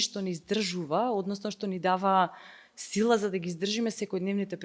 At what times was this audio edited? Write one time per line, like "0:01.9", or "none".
none